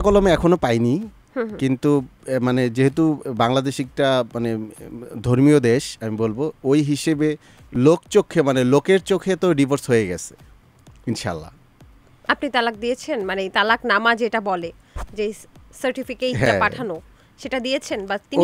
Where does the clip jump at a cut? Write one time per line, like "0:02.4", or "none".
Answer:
none